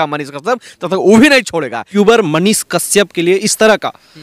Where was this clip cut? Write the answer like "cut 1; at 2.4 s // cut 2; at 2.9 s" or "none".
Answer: cut 1; at 1.9 s